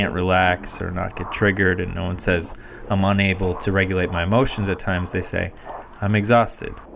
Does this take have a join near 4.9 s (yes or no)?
no